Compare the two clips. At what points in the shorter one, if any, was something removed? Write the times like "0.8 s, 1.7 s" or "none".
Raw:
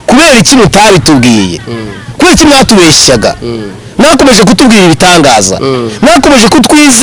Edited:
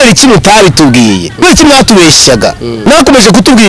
1.3 s, 2.7 s